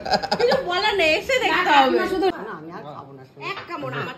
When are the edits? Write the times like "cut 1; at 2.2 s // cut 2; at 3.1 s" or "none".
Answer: cut 1; at 2.3 s